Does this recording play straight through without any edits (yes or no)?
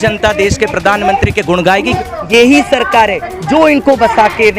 no